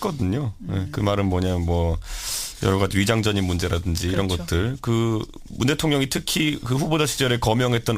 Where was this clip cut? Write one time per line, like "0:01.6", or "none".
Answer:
none